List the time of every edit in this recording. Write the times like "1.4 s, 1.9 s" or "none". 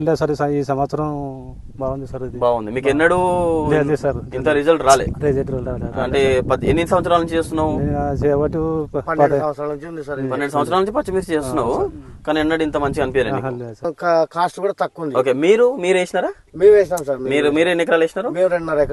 13.9 s